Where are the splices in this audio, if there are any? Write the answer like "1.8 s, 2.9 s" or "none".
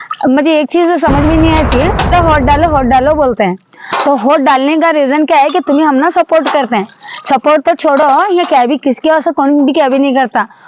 2.1 s